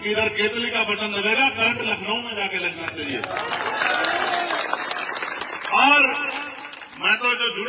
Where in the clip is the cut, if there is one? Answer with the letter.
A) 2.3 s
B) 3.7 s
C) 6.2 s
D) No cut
D